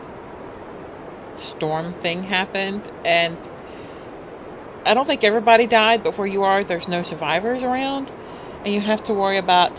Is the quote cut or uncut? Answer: cut